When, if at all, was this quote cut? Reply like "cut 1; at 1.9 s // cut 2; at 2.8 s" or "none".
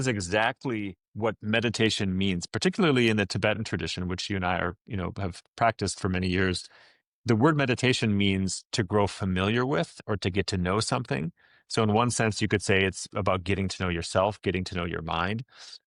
none

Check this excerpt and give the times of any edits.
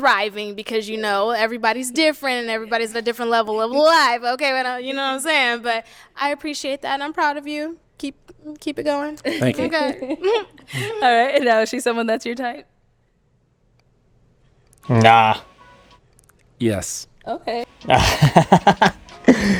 none

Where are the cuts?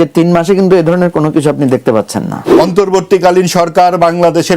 cut 1; at 2.5 s

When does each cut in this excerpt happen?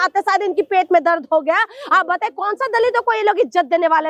none

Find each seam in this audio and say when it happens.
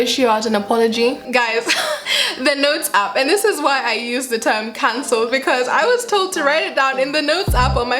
cut 1; at 1.2 s // cut 2; at 2.2 s

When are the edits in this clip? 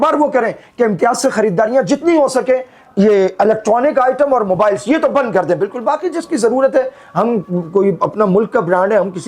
none

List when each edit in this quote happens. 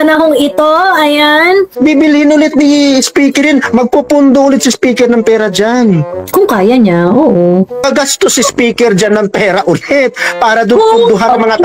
cut 1; at 1.7 s // cut 2; at 6.1 s // cut 3; at 7.9 s

